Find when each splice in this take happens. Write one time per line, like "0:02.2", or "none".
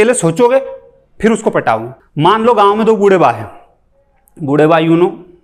0:02.0

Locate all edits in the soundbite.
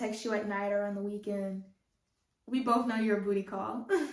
none

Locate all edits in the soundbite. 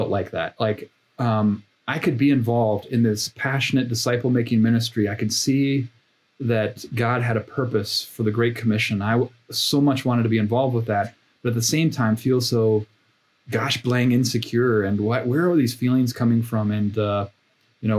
none

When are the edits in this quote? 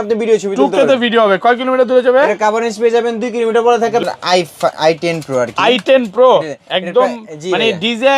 0:04.0

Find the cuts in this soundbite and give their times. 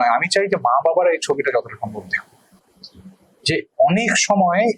none

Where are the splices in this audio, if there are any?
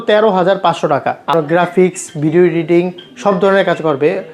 0:01.3

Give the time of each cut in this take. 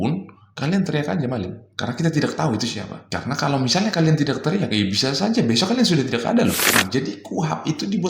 0:06.7

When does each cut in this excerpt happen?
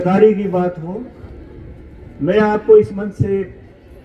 none

